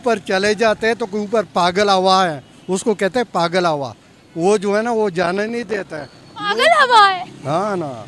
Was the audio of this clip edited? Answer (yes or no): no